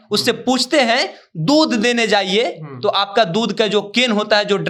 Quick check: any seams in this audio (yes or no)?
no